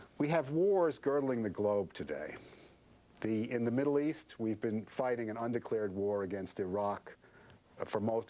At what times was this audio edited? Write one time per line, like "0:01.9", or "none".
none